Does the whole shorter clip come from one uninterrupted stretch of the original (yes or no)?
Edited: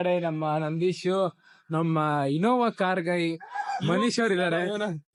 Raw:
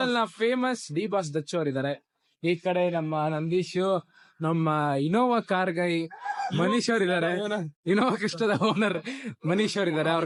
yes